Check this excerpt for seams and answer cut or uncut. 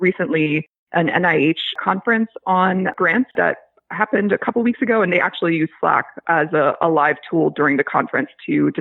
cut